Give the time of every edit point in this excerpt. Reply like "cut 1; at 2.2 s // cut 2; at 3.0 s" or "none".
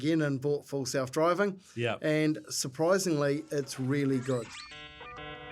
cut 1; at 4.6 s